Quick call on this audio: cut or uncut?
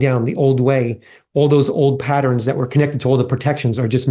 uncut